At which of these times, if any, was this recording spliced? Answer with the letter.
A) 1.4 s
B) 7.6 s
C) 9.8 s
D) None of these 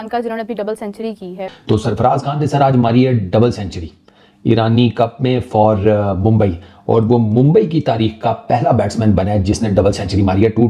A